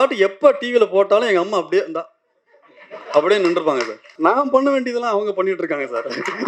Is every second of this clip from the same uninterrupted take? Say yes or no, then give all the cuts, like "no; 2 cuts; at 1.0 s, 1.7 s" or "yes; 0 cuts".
no; 1 cut; at 4.0 s